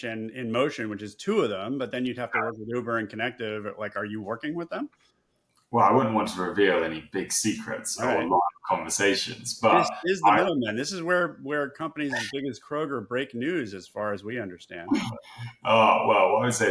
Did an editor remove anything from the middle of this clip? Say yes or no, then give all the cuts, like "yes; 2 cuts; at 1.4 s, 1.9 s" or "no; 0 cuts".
no; 0 cuts